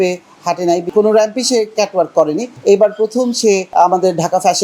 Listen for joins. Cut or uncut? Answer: cut